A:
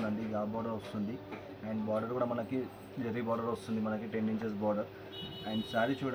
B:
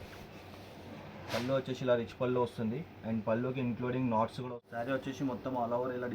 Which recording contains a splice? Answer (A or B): B